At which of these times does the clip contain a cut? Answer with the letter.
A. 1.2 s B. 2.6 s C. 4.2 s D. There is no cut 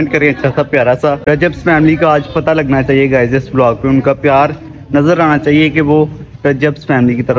A